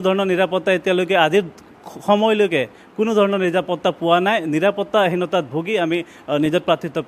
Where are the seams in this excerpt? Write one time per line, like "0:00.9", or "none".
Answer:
none